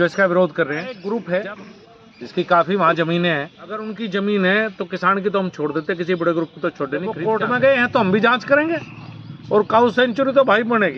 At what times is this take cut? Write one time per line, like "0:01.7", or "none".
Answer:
0:00.9
0:03.9
0:07.2